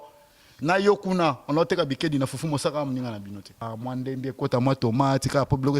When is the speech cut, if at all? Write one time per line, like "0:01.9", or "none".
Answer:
0:03.7